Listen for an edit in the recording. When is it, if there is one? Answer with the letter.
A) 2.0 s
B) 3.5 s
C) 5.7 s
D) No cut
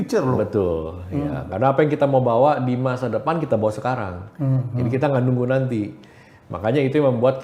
D